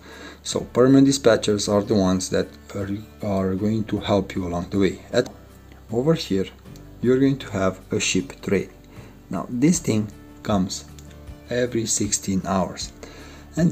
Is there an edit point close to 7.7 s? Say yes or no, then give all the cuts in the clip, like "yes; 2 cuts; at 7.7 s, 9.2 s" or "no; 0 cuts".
no; 1 cut; at 5.3 s